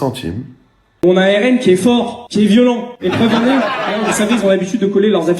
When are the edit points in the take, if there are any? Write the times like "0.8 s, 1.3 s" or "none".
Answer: 0.9 s